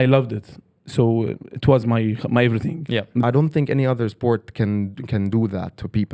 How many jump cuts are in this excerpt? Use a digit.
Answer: 1